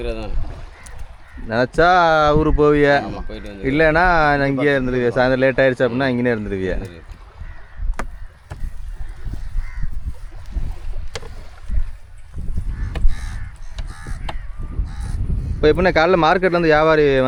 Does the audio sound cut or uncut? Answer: uncut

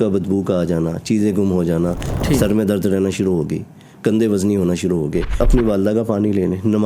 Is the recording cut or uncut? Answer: cut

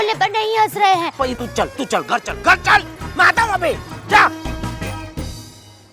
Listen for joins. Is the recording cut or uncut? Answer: cut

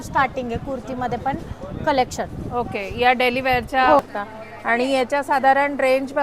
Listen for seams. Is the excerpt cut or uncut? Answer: cut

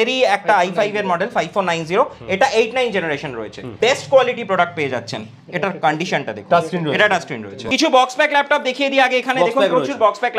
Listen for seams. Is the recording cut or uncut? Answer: cut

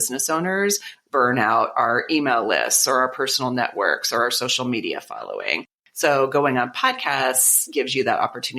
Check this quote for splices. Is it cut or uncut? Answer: cut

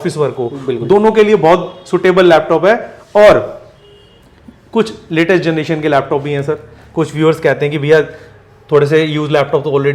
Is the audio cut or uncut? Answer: uncut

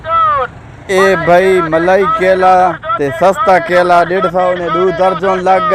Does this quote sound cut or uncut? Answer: uncut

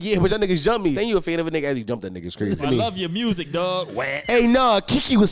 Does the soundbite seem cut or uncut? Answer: cut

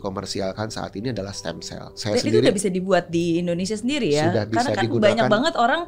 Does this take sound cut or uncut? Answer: cut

